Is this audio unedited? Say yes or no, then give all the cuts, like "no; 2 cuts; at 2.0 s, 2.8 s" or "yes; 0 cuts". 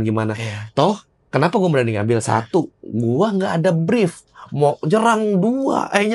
yes; 0 cuts